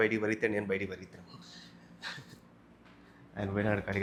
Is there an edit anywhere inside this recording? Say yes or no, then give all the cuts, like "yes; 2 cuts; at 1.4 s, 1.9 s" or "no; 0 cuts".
no; 0 cuts